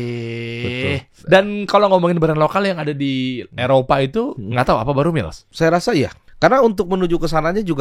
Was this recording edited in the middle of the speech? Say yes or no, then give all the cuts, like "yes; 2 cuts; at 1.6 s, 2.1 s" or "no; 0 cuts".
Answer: yes; 4 cuts; at 1.1 s, 4.4 s, 5.4 s, 6.2 s